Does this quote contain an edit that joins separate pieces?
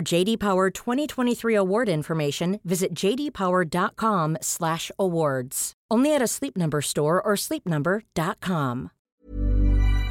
yes; 1 cut; at 8.9 s

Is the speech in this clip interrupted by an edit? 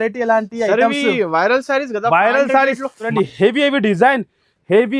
yes; 1 cut; at 3.1 s

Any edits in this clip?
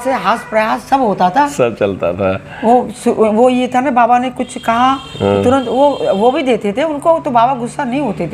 no; 0 cuts

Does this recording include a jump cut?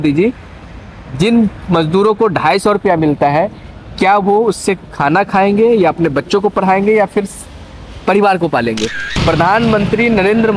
yes; 1 cut; at 9.1 s

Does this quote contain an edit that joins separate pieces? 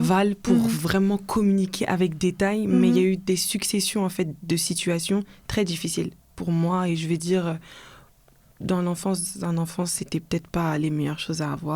no; 0 cuts

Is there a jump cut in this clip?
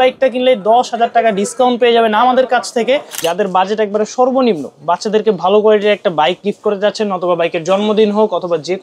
yes; 1 cut; at 3.1 s

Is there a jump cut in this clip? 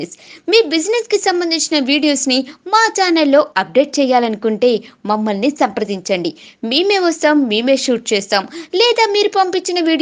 no; 0 cuts

